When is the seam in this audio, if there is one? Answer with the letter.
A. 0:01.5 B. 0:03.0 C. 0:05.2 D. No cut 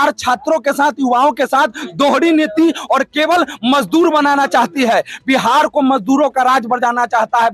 D